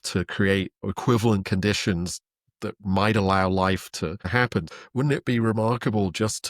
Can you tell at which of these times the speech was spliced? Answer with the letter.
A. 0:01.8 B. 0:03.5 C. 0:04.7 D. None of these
C